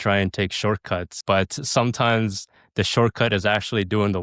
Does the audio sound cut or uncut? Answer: uncut